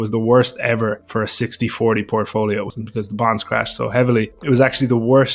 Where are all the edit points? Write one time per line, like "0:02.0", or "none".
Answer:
0:01.0
0:02.8
0:04.3